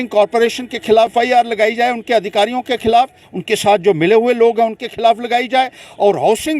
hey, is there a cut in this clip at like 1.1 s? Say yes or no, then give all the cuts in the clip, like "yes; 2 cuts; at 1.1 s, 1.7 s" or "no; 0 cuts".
yes; 1 cut; at 1.1 s